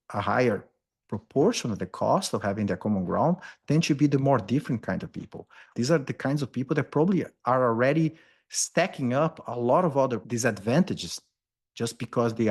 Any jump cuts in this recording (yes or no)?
yes